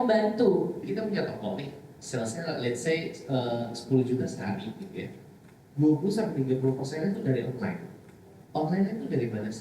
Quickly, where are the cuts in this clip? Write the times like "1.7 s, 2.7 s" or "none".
0.9 s